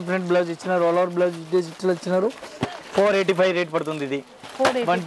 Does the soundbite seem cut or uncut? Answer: uncut